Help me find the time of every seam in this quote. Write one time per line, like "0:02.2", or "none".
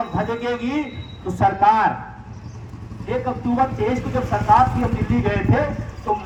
none